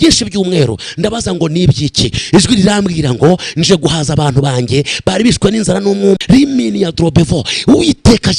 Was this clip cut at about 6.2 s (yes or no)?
yes